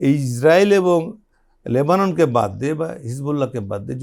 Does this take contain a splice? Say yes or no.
no